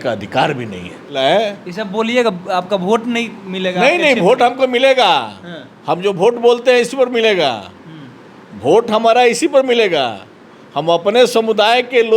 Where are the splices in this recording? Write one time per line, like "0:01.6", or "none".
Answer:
0:01.1

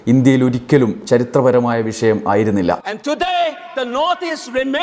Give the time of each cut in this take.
0:02.9

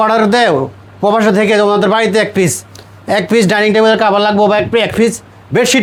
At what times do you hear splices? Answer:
none

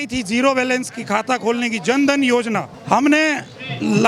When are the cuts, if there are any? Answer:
0:02.7

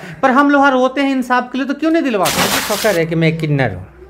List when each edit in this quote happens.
0:02.6

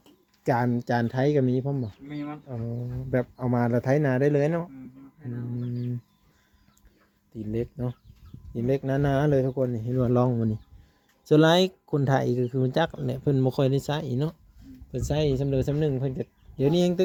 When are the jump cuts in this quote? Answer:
none

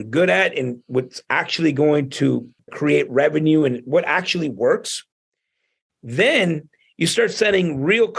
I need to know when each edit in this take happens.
0:02.5

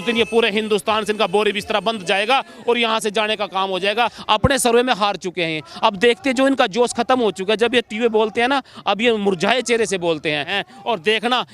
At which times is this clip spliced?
0:04.2
0:10.5

